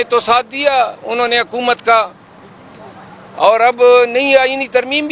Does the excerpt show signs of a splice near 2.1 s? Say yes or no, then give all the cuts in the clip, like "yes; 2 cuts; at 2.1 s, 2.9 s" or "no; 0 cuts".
no; 0 cuts